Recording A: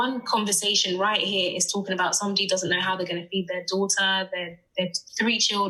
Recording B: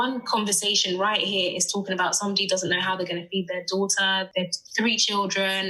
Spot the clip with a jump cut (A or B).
B